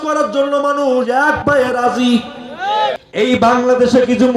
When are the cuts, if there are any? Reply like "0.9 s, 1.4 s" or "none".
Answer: 3.0 s